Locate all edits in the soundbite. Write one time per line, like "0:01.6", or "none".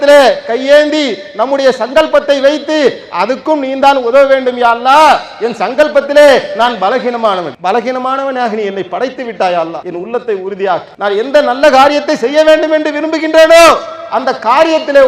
0:07.5
0:09.8
0:10.9